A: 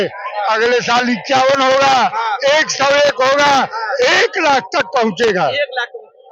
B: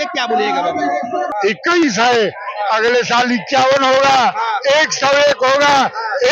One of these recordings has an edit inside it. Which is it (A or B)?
B